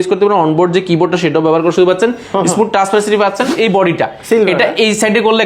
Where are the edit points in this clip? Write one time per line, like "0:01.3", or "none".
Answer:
0:03.5